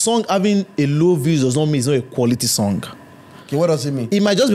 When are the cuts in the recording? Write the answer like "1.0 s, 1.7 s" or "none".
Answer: none